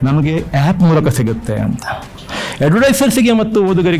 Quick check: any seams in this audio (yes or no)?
yes